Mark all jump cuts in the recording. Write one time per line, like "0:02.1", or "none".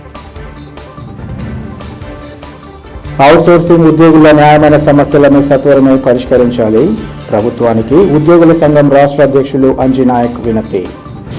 0:01.7